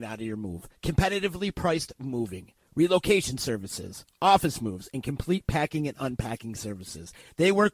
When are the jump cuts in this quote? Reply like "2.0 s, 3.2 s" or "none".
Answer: none